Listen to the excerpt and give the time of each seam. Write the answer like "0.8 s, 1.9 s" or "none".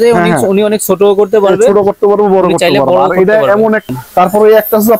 3.9 s